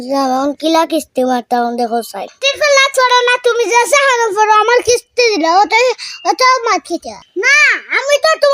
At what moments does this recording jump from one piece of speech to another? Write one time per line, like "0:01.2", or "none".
0:07.1